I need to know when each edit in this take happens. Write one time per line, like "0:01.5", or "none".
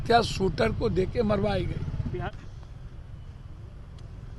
0:02.3